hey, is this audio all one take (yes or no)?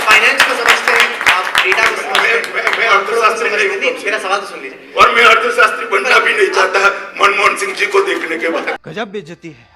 no